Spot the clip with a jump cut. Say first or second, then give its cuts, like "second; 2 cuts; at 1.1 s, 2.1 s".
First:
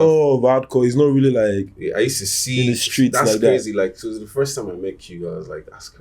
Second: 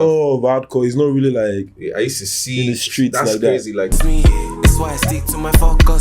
second; 1 cut; at 4.0 s